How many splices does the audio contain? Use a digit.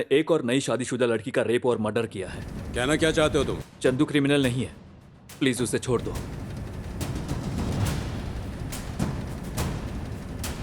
1